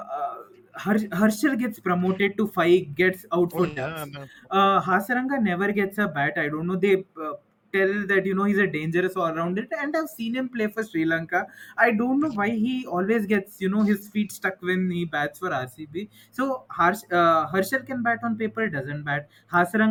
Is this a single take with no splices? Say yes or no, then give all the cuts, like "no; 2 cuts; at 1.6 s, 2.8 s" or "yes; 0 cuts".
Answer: yes; 0 cuts